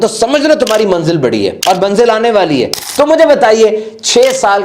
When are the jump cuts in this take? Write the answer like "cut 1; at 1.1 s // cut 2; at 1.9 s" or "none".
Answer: cut 1; at 1.6 s // cut 2; at 2.8 s

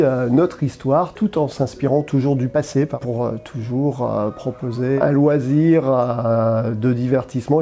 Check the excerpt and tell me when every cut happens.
cut 1; at 3.0 s // cut 2; at 5.0 s

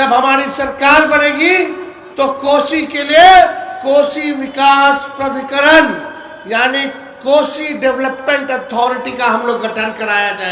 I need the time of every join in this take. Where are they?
none

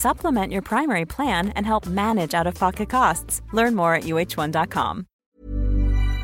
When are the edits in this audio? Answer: cut 1; at 5.1 s

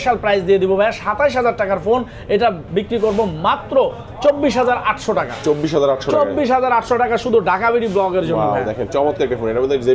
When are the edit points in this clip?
none

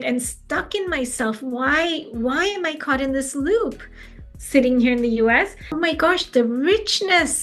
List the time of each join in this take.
cut 1; at 5.6 s

